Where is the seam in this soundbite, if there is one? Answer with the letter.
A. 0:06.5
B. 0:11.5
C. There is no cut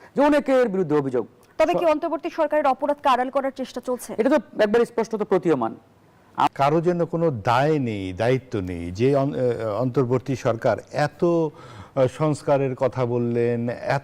A